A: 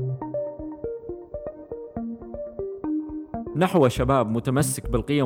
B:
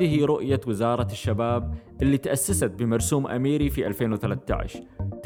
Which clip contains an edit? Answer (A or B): A